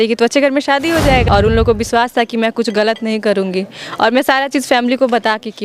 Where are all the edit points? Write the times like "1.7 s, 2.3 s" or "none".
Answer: 1.3 s